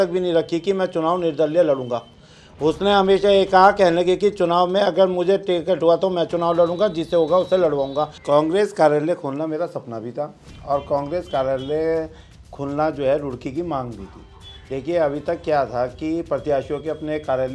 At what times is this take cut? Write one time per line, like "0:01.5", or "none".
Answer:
0:08.2